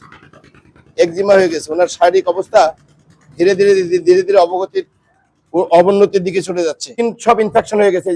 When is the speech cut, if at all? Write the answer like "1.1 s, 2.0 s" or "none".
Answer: 6.9 s